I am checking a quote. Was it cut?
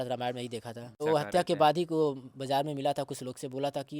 yes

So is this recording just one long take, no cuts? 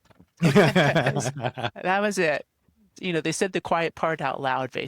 no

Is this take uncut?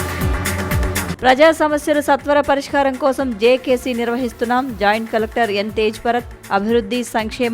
no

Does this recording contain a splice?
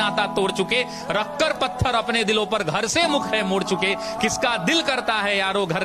no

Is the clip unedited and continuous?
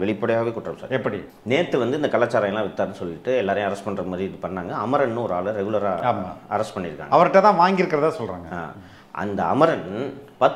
no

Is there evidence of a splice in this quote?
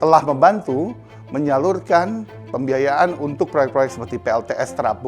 no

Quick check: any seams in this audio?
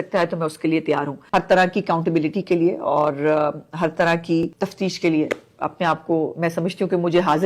yes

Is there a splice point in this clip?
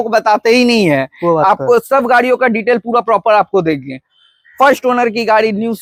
no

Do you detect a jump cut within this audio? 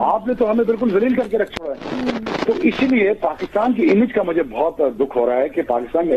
no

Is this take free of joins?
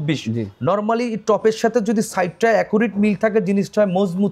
yes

